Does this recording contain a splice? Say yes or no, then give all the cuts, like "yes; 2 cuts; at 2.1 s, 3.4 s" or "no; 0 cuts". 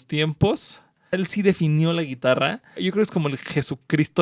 yes; 2 cuts; at 1.2 s, 2.7 s